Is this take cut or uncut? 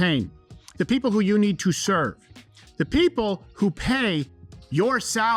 uncut